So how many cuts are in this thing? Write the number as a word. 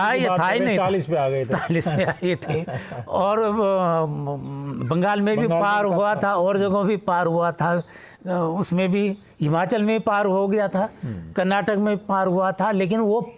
zero